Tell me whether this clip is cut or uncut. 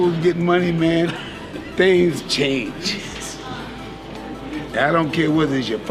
uncut